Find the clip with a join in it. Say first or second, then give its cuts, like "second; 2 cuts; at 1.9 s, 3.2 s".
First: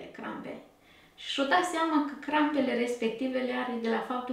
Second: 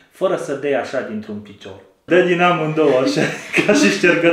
second; 1 cut; at 1.9 s